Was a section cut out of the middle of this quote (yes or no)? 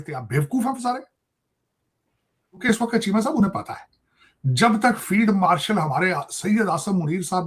yes